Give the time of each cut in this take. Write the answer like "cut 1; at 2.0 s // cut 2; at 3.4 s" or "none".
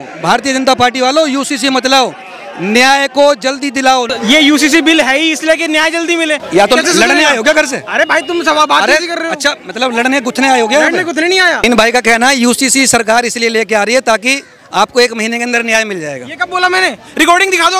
cut 1; at 4.1 s // cut 2; at 6.4 s // cut 3; at 11.6 s